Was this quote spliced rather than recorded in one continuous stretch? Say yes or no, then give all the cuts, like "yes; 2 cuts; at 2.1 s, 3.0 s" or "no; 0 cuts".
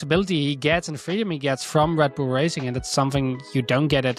no; 0 cuts